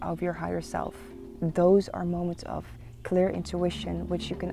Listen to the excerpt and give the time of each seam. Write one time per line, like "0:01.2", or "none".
none

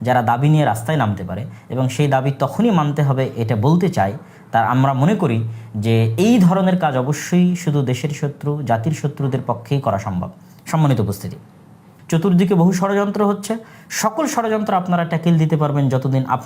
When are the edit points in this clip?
0:11.9

